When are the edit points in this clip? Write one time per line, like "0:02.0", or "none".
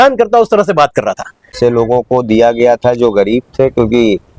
0:01.5